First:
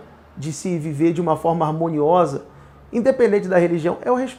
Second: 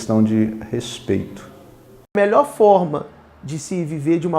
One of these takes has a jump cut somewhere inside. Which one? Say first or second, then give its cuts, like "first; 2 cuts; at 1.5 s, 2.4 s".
second; 1 cut; at 2.1 s